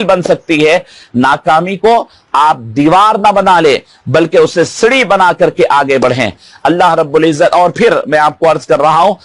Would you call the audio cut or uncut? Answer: uncut